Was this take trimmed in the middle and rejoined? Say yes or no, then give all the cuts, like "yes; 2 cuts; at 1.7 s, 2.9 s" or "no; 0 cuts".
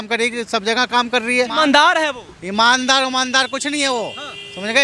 yes; 1 cut; at 1.5 s